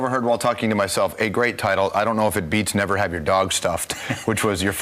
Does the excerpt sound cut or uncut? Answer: cut